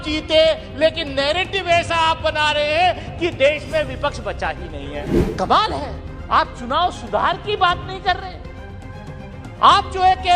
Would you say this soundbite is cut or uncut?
cut